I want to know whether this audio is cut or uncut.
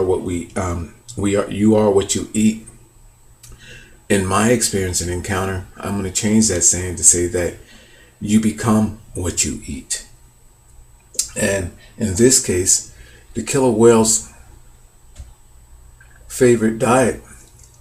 cut